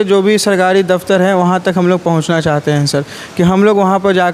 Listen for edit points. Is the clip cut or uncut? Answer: uncut